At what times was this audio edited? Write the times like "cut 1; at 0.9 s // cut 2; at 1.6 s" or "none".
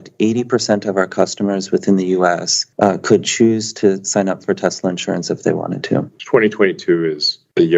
none